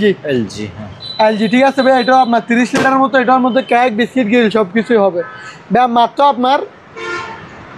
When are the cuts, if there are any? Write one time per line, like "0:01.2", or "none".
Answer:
none